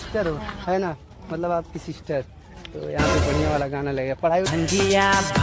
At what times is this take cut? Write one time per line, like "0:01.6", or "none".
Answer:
none